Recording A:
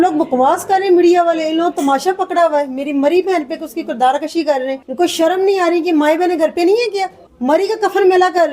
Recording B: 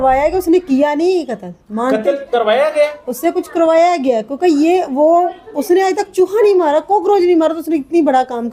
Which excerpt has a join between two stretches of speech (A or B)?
A